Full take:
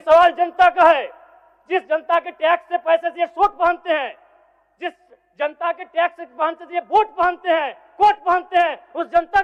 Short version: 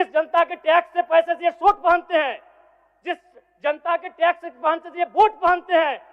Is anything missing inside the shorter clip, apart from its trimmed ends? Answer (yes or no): no